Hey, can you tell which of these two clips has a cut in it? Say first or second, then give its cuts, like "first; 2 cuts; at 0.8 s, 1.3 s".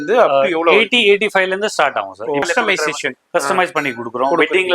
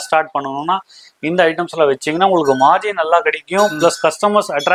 first; 1 cut; at 2.4 s